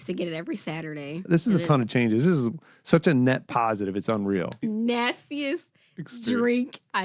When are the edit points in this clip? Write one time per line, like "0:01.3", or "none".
0:01.2
0:04.6